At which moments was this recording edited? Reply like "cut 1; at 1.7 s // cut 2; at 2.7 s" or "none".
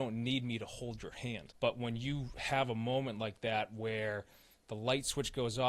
cut 1; at 1.5 s